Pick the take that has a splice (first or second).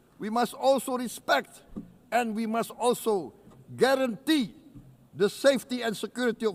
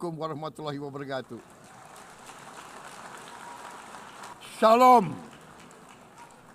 second